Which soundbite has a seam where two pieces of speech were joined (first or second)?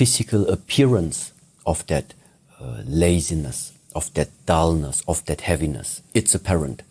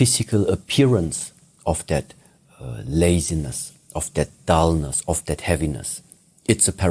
first